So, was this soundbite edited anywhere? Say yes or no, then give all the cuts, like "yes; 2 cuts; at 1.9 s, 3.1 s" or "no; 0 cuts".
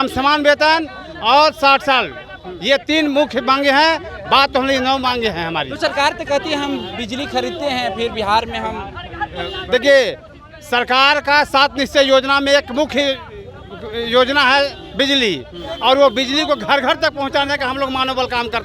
no; 0 cuts